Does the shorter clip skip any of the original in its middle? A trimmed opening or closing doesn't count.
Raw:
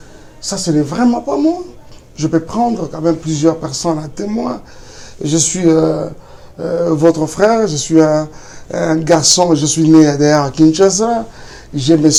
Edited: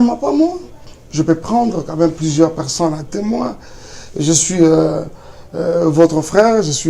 no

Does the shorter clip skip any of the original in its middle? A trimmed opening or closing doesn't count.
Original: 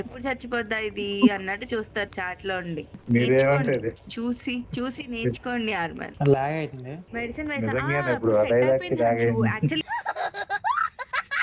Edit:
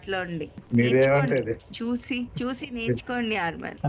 no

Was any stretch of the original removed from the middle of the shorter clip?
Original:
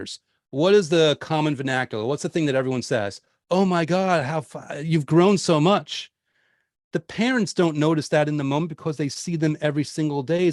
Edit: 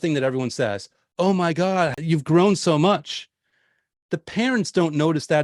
yes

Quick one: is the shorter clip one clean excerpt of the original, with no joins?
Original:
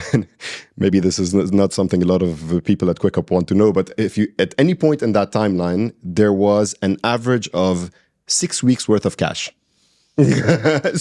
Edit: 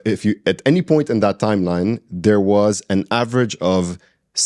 yes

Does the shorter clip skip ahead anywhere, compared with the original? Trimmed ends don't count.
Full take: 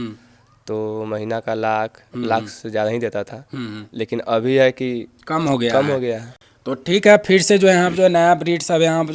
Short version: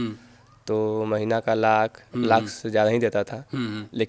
no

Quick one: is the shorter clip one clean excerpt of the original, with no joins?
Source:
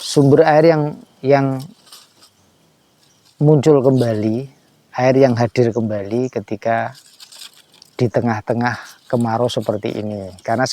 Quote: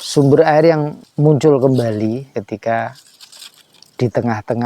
no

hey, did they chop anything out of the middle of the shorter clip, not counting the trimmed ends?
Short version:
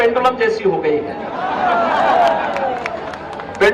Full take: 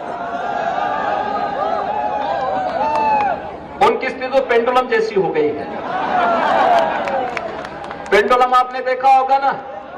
no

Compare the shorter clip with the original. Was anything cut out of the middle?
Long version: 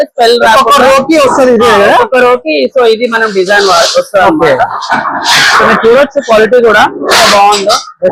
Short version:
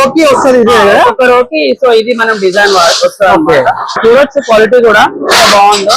yes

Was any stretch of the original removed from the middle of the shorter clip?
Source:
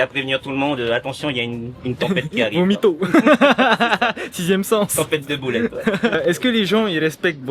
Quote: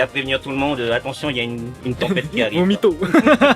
no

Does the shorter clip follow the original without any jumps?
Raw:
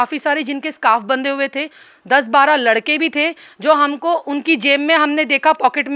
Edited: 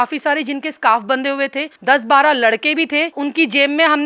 no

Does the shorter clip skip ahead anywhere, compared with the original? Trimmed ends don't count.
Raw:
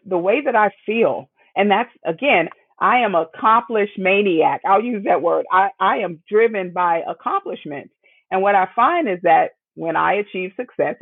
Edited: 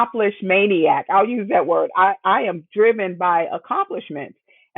no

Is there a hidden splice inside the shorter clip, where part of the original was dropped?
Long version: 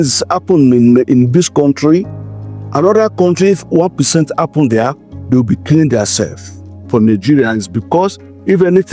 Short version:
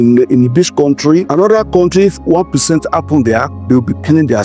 yes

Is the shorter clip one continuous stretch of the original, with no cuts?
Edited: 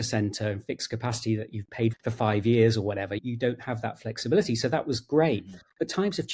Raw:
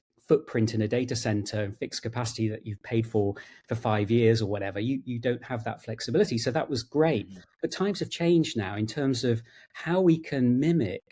no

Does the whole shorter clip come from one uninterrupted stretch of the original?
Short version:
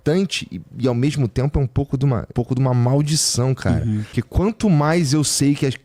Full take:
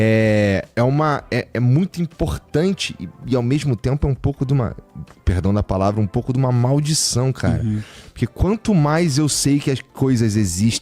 no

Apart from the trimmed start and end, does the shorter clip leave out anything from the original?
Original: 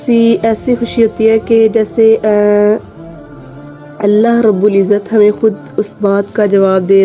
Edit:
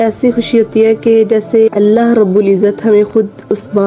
yes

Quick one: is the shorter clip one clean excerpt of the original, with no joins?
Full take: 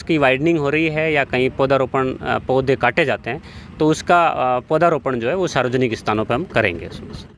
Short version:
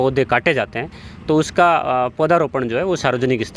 yes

